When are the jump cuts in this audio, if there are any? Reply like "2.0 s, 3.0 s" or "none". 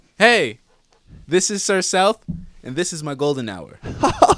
none